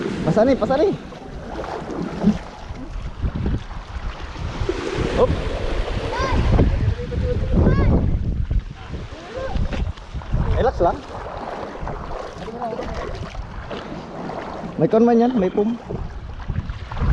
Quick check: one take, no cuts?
yes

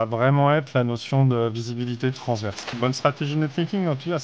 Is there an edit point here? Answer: yes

